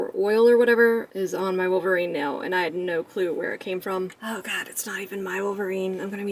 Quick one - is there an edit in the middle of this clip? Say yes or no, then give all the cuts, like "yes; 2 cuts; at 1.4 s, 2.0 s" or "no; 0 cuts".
yes; 2 cuts; at 1.1 s, 4.2 s